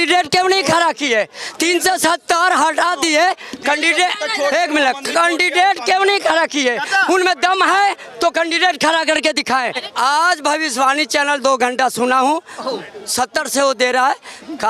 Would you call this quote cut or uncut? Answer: cut